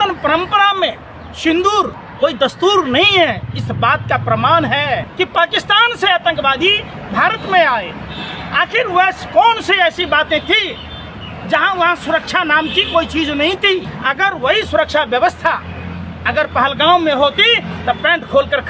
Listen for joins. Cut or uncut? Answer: cut